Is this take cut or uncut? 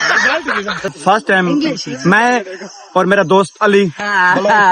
cut